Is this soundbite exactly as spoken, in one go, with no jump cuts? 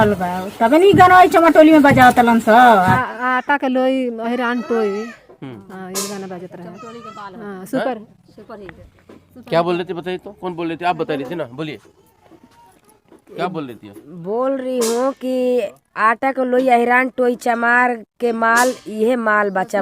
no; 1 cut; at 2.8 s

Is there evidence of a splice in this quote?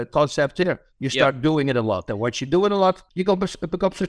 yes; 1 cut; at 3.1 s

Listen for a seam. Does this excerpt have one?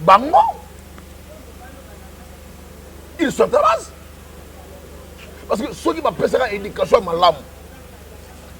no; 0 cuts

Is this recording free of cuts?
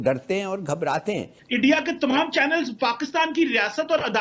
no; 1 cut; at 1.4 s

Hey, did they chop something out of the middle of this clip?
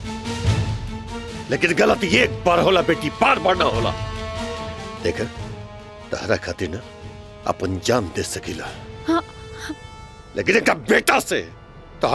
no; 0 cuts

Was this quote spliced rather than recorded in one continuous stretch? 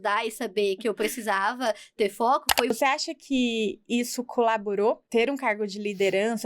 yes; 2 cuts; at 2.7 s, 5.0 s

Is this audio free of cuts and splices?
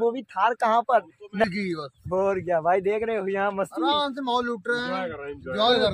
no; 1 cut; at 1.4 s

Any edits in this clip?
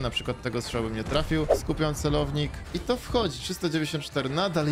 yes; 2 cuts; at 1.5 s, 2.6 s

